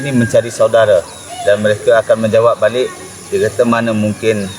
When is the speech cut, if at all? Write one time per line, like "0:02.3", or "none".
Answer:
none